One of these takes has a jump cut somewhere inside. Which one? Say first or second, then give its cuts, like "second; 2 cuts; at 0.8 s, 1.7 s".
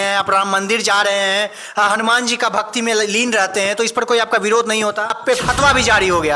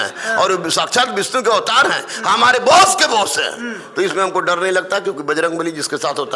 first; 1 cut; at 5.2 s